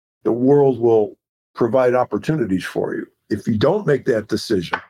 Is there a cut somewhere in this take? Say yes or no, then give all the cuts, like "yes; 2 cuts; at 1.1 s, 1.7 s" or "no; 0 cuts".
no; 0 cuts